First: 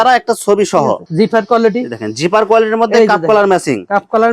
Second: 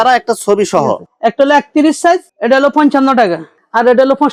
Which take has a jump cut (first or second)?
first